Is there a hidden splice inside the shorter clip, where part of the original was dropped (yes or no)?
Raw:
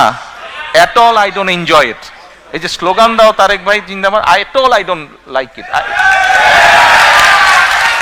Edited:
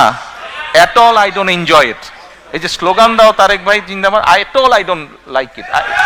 no